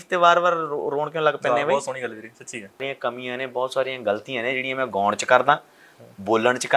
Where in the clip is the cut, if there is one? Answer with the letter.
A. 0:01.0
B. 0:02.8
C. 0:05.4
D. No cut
B